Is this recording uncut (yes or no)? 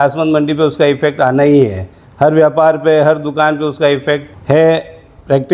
no